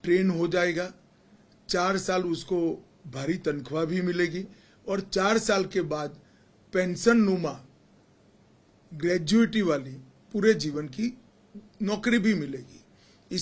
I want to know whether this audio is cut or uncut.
uncut